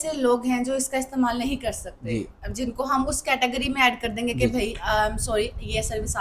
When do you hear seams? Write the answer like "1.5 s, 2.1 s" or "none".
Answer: none